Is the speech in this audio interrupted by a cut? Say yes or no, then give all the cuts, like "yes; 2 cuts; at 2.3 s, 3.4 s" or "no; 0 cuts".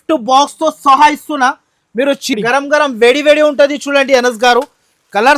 no; 0 cuts